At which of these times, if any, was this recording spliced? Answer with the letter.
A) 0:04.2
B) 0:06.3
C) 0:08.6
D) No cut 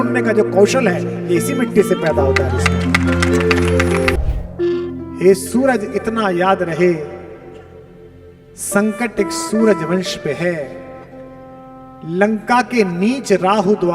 A